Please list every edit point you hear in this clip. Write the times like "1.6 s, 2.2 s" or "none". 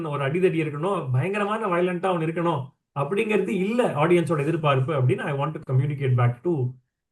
none